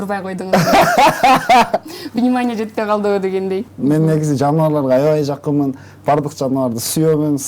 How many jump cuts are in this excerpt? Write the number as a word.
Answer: one